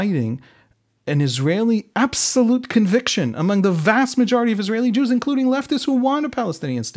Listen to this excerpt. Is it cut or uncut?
uncut